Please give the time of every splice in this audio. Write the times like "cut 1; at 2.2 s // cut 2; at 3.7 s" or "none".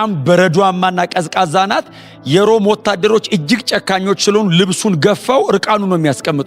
none